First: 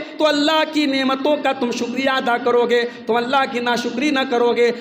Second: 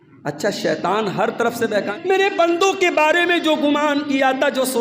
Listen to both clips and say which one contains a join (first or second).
second